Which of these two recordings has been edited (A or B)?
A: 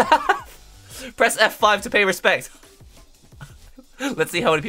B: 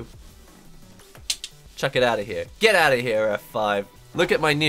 B